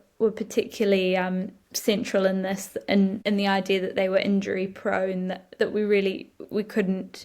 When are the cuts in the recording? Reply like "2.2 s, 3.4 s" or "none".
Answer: 3.2 s